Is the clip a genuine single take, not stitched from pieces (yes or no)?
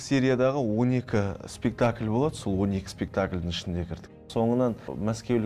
yes